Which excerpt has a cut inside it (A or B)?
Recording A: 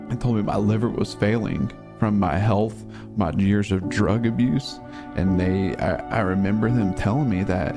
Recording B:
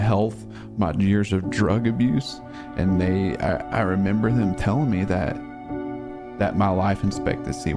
B